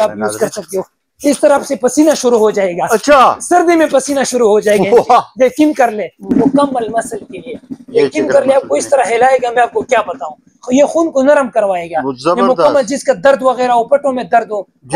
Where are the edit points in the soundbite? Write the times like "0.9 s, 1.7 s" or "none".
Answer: 6.2 s, 10.5 s